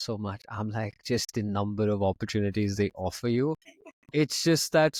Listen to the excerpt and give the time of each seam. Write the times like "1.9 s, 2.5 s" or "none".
none